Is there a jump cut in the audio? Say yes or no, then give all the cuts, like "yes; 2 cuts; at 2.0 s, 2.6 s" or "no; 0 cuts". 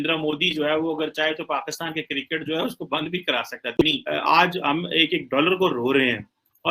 yes; 1 cut; at 3.8 s